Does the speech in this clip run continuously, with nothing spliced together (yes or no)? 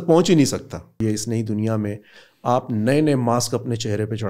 no